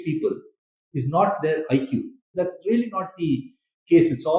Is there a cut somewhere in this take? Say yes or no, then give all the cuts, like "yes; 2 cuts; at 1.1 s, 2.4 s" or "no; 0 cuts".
yes; 1 cut; at 2.2 s